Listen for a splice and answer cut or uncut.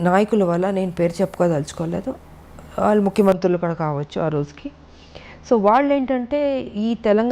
uncut